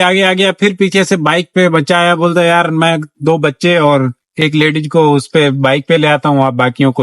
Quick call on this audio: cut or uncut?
uncut